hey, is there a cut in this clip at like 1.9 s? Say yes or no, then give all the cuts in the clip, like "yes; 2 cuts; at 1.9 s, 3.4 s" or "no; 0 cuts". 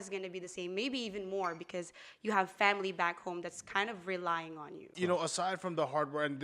no; 1 cut; at 4.9 s